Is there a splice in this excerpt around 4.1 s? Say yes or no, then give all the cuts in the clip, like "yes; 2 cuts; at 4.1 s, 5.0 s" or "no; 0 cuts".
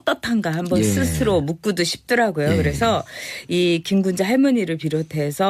yes; 1 cut; at 4.1 s